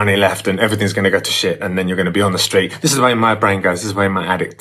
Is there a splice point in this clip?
no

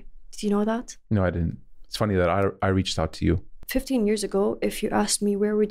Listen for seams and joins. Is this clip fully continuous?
no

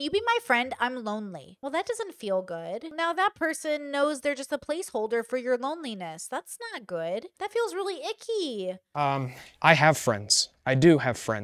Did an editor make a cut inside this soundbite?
yes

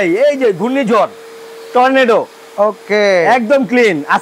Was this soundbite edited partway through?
no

